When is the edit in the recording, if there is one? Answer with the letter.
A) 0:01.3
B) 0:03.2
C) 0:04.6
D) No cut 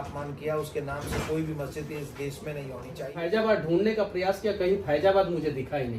B